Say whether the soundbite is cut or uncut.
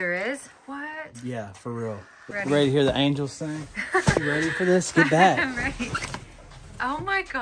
cut